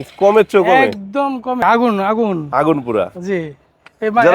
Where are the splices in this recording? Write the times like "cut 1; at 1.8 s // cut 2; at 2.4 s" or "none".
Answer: cut 1; at 1.6 s